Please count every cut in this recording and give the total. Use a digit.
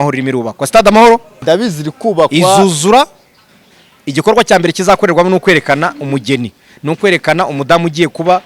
1